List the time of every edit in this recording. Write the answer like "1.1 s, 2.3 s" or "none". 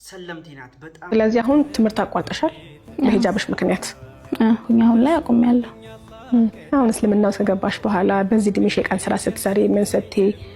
1.1 s